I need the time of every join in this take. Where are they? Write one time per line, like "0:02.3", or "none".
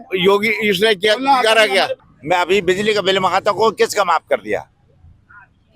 0:02.0